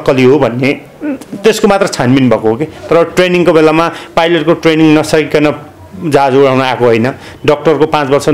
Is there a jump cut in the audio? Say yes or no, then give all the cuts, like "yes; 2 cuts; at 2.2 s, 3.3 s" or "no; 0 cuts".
no; 0 cuts